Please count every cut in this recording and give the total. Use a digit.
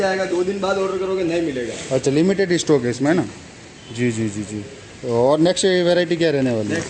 0